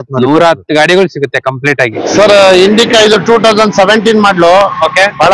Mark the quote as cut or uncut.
cut